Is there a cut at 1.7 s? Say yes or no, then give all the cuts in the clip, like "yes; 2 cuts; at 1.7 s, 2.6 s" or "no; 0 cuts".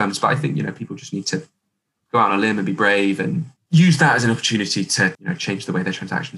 no; 2 cuts; at 3.5 s, 5.2 s